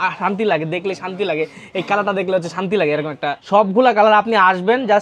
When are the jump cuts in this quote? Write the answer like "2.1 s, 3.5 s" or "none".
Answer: 3.4 s